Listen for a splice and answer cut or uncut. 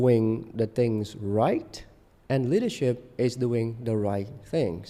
uncut